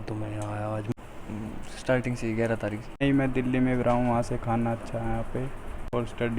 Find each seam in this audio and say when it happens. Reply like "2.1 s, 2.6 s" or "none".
0.9 s, 3.0 s